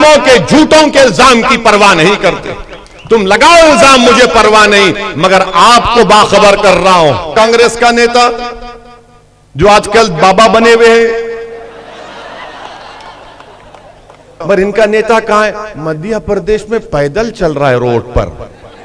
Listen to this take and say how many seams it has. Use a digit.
2